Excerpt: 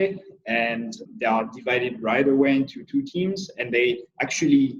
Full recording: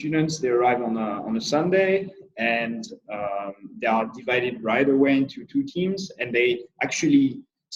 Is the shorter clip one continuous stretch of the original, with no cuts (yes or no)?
no